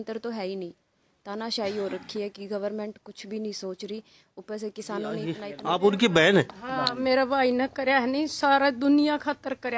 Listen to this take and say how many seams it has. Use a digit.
1